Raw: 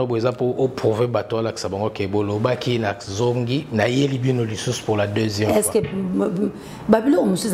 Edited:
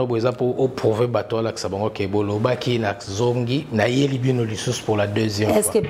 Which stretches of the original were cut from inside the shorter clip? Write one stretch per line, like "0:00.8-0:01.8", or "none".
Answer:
none